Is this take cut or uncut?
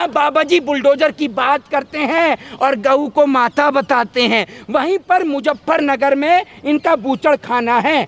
uncut